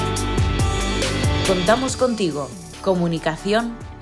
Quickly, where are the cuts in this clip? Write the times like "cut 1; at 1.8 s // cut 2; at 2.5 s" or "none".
cut 1; at 1.5 s